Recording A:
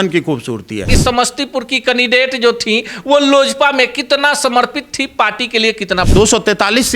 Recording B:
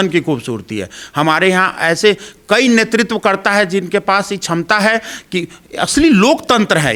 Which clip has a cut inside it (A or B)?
A